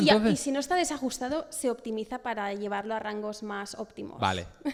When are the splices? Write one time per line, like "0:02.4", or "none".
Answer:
none